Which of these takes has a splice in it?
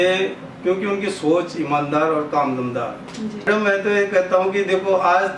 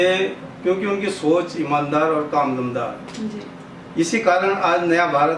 first; 1 cut; at 3.5 s

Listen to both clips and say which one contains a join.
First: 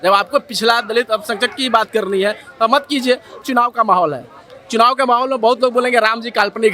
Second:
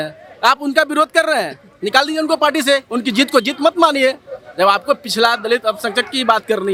first; 1 cut; at 3.4 s

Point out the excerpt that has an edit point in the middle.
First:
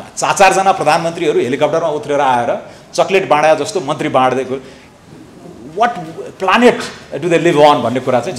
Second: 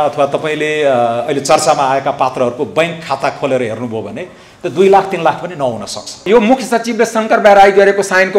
second; 1 cut; at 6.2 s

